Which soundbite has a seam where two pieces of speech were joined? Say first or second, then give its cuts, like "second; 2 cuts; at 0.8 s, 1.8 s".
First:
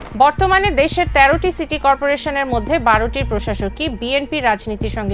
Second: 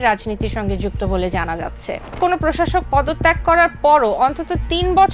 second; 1 cut; at 2.2 s